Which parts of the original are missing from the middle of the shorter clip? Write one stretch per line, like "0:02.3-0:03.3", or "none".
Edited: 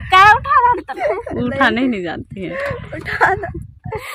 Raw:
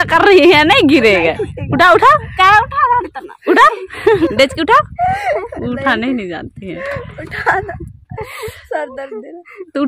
0:03.3-0:05.3